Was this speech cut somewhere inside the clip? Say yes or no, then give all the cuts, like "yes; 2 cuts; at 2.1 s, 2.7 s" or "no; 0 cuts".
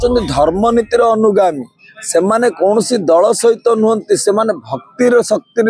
no; 0 cuts